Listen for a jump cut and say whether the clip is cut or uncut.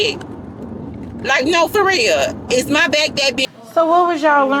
cut